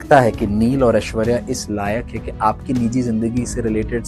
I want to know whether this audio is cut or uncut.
uncut